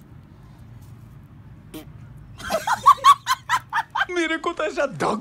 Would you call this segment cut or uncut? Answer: uncut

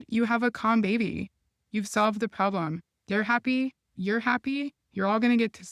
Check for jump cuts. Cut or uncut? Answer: uncut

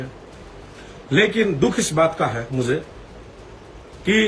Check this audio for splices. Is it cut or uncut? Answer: uncut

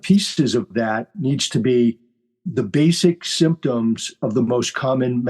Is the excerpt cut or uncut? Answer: cut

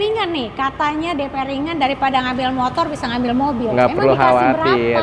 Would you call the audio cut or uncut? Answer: uncut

